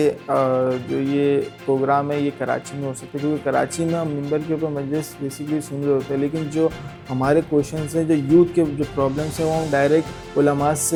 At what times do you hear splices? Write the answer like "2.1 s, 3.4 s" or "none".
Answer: none